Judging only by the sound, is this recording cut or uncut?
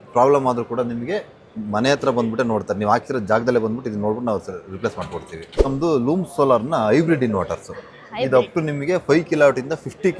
cut